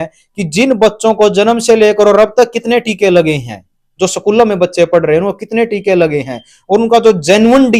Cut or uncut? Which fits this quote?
uncut